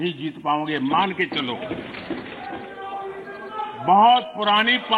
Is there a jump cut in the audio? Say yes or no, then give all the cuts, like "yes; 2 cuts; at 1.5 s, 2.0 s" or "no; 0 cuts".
yes; 1 cut; at 2.3 s